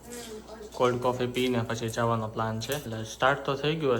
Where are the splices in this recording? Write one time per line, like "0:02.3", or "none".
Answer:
0:02.9